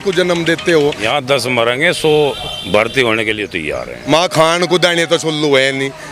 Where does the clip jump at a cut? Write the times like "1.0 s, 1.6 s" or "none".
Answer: 1.0 s, 3.9 s